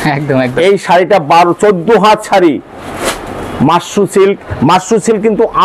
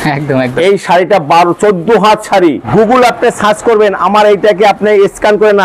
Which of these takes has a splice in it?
second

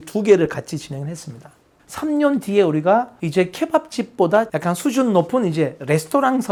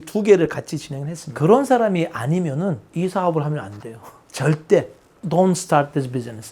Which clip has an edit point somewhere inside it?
second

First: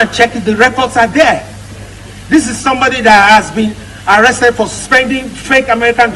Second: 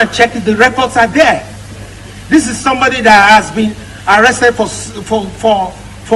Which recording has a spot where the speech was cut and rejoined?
first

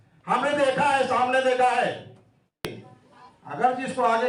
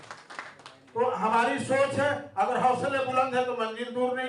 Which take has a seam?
first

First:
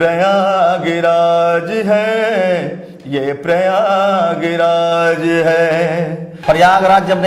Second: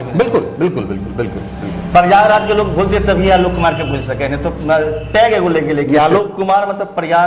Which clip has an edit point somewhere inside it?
first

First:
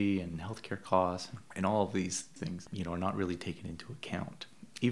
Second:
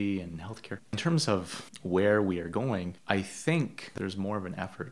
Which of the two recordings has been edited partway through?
second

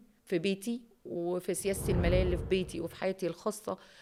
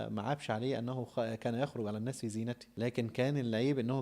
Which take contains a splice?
second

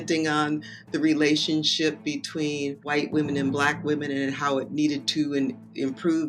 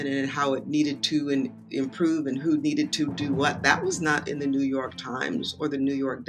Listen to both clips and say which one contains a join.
first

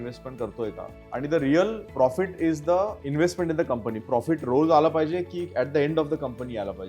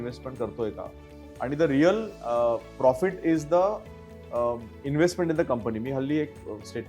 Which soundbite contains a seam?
first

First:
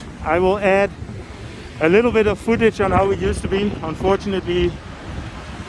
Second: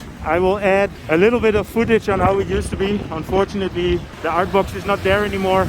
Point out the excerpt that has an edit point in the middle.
second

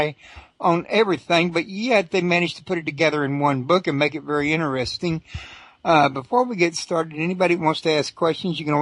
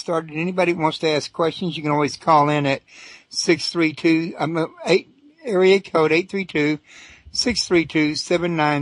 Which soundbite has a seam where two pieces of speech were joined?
second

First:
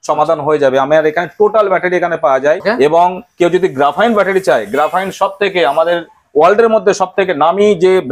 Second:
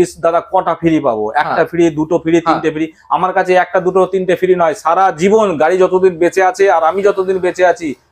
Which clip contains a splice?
first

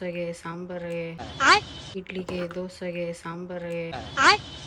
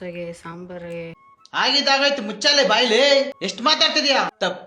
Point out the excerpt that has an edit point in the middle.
second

